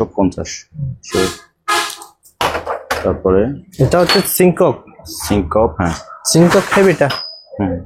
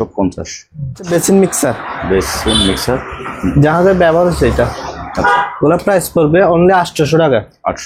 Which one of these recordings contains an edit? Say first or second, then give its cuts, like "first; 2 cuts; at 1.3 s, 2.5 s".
second; 1 cut; at 1.1 s